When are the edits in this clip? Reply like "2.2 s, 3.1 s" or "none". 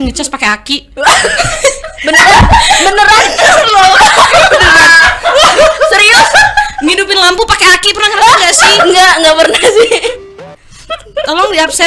10.4 s